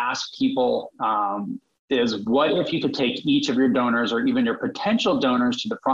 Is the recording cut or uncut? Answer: uncut